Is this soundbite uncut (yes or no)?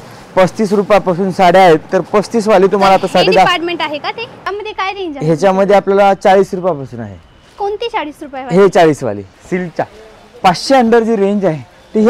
no